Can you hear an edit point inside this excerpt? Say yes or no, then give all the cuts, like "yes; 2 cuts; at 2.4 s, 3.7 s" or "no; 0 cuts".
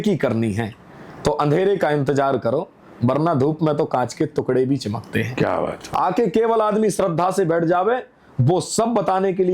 yes; 1 cut; at 5.8 s